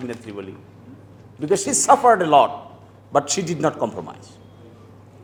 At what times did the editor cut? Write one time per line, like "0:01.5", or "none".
none